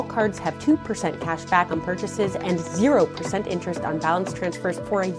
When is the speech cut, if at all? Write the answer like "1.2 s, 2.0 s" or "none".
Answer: none